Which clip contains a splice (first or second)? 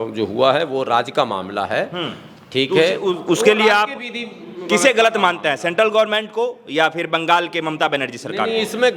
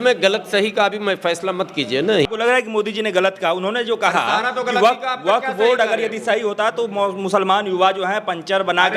second